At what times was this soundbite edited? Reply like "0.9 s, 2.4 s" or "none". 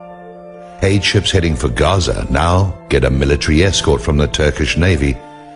2.5 s